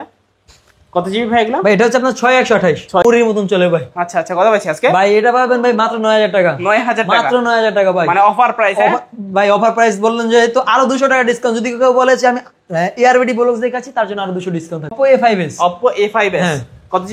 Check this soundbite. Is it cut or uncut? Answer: cut